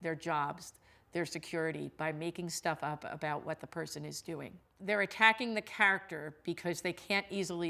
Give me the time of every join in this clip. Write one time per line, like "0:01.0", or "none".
0:04.6